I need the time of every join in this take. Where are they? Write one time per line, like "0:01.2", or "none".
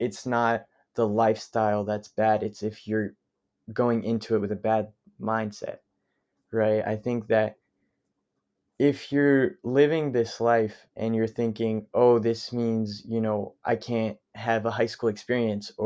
none